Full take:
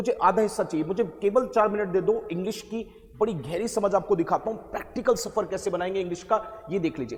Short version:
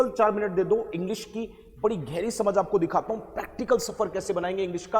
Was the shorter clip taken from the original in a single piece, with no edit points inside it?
yes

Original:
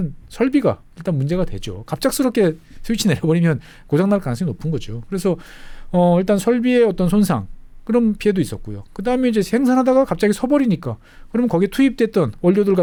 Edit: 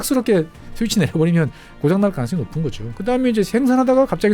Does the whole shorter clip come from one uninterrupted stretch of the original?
no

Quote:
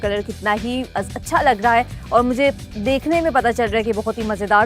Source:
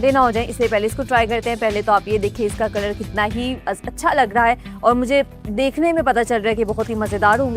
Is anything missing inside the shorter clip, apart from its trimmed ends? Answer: no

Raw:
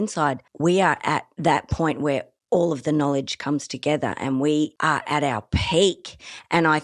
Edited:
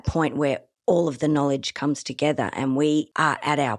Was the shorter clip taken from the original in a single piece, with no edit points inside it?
yes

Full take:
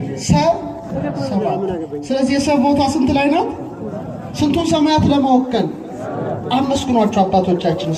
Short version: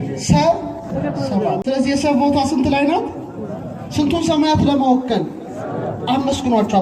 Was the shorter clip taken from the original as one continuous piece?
no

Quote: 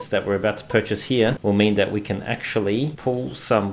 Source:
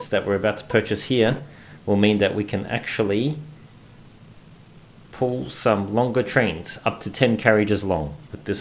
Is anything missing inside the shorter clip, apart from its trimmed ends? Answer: yes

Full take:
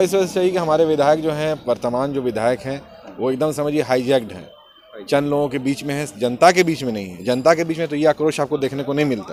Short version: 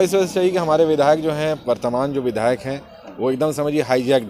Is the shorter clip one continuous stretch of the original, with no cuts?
yes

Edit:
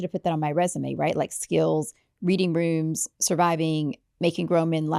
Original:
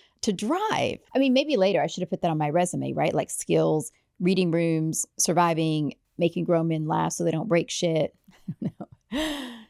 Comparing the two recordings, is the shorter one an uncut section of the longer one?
yes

